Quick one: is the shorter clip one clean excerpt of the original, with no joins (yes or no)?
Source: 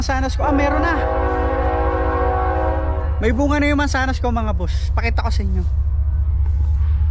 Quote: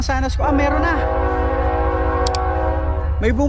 yes